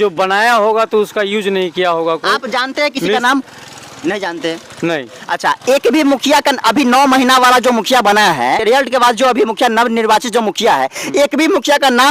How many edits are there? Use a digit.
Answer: 1